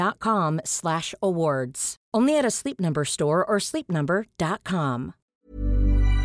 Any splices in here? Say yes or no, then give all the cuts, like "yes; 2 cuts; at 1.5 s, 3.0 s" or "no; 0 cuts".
yes; 1 cut; at 5.3 s